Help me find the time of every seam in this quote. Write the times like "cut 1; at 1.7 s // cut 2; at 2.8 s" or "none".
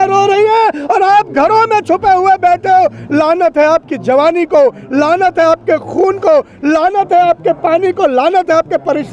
none